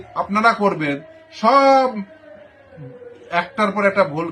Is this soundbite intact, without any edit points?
yes; 0 cuts

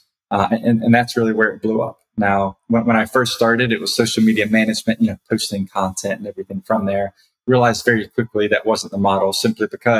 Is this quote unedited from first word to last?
yes; 0 cuts

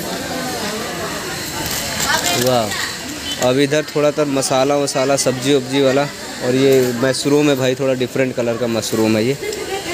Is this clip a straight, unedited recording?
yes; 0 cuts

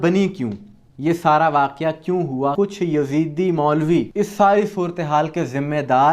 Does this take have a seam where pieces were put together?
yes; 2 cuts; at 2.5 s, 4.1 s

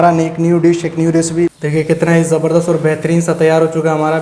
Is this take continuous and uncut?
no; 1 cut; at 1.5 s

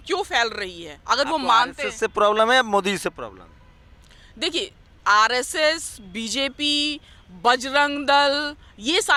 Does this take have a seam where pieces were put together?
no; 0 cuts

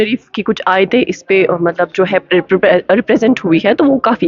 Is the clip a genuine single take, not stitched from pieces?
yes; 0 cuts

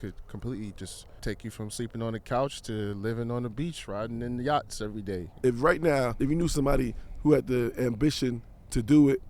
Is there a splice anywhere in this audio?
yes; 3 cuts; at 1.0 s, 5.3 s, 6.1 s

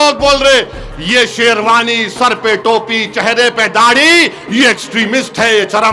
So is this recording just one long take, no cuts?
yes; 0 cuts

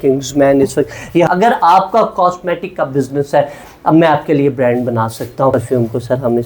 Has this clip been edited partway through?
yes; 2 cuts; at 1.3 s, 5.5 s

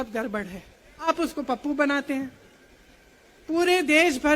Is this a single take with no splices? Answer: no; 1 cut; at 1.1 s

